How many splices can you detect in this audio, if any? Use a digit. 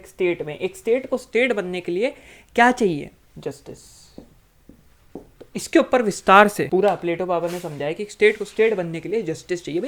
2